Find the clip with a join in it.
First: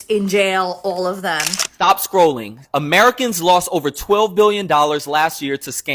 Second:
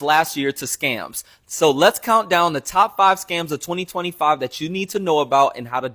first; 1 cut; at 1.7 s

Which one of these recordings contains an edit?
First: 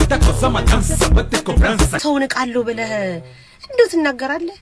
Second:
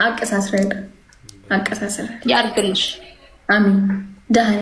first; 1 cut; at 2.0 s

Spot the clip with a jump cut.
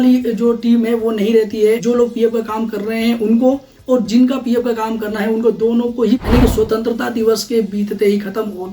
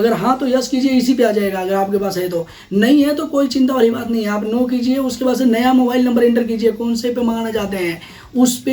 first; 2 cuts; at 1.8 s, 6.2 s

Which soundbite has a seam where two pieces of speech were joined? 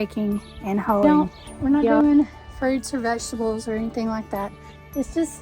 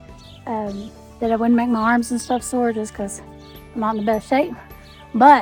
first; 1 cut; at 1.0 s

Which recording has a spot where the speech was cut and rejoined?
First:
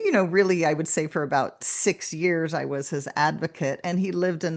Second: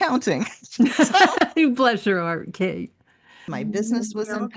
second; 1 cut; at 3.4 s

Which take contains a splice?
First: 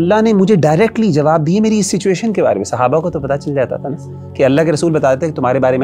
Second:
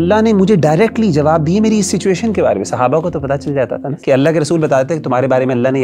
second; 1 cut; at 3.9 s

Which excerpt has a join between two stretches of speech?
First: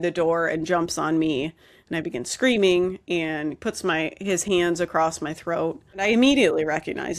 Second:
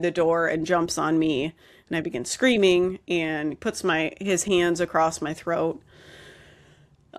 first; 1 cut; at 6.0 s

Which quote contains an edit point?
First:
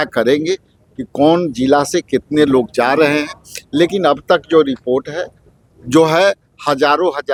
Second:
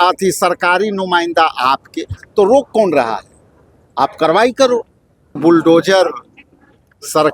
second; 1 cut; at 5.4 s

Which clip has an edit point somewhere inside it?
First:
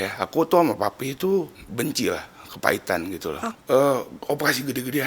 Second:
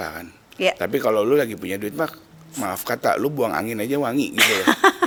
first; 2 cuts; at 1.6 s, 3.5 s

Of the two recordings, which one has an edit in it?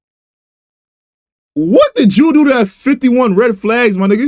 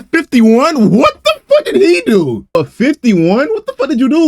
second; 1 cut; at 2.5 s

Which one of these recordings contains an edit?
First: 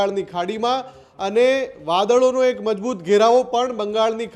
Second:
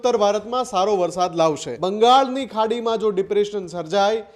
second; 1 cut; at 1.7 s

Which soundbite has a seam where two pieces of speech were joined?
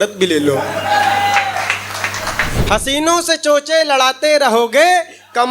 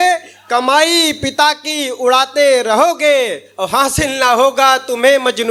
first; 1 cut; at 2.5 s

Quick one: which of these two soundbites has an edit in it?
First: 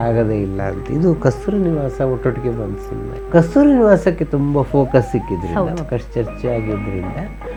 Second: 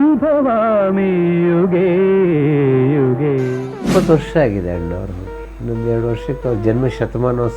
second; 1 cut; at 3.9 s

